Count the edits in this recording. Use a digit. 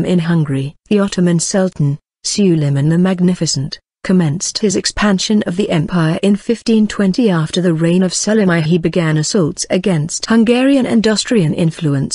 0